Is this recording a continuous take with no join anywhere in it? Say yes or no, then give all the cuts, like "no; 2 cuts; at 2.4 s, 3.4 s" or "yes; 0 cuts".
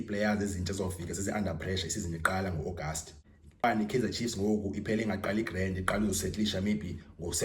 no; 1 cut; at 3.6 s